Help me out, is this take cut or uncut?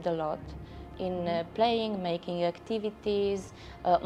uncut